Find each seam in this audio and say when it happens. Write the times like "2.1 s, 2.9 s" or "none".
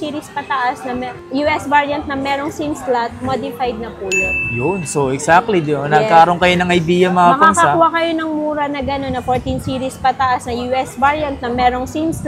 none